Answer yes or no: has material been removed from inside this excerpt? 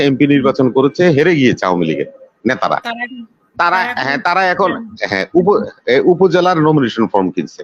no